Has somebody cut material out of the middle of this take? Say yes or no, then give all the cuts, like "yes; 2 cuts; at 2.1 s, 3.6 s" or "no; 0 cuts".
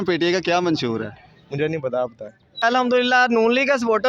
yes; 1 cut; at 2.6 s